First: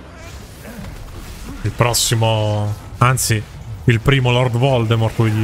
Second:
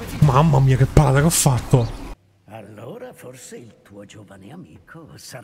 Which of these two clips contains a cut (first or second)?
second